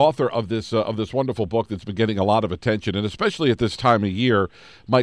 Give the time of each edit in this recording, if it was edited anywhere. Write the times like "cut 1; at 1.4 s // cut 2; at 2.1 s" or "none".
none